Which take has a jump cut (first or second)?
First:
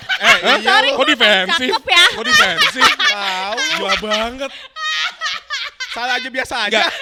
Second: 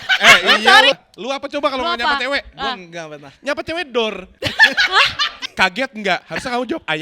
second